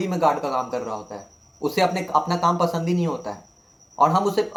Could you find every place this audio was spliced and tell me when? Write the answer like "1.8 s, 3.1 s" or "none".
none